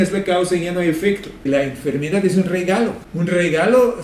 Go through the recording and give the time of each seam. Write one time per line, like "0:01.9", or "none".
0:01.5
0:03.0